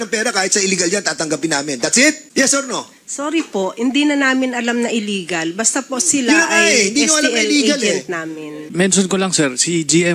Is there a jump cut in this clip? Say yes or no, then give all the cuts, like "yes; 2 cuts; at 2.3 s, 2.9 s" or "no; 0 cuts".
yes; 2 cuts; at 2.2 s, 8.6 s